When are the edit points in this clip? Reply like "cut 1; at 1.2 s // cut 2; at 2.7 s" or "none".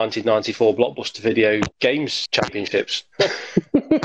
cut 1; at 2.0 s // cut 2; at 3.0 s